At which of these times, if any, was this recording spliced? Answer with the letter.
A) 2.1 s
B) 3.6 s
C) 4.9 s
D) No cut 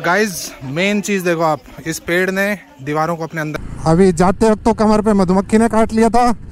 B